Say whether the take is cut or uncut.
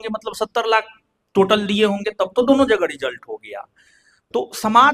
uncut